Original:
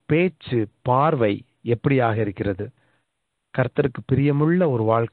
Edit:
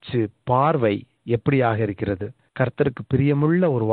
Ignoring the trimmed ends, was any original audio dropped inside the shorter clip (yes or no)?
yes